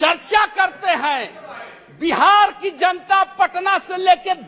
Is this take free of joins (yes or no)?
yes